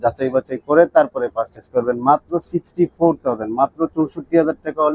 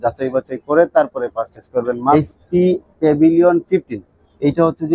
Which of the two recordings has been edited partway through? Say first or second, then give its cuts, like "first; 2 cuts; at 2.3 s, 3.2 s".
second; 1 cut; at 2.1 s